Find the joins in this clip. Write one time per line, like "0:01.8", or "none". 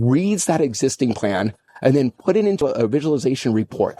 0:01.6
0:02.6